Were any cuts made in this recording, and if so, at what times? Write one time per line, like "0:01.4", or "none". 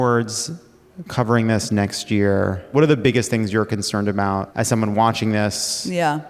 0:02.7
0:04.5